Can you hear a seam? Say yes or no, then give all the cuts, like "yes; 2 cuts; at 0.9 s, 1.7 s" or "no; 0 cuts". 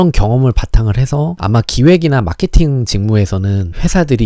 yes; 1 cut; at 1.3 s